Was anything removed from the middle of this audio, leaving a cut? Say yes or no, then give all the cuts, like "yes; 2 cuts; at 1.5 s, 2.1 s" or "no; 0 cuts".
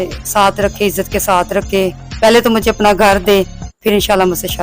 yes; 1 cut; at 3.6 s